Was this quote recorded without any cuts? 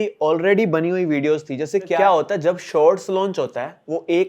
no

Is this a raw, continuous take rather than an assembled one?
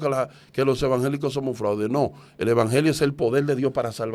yes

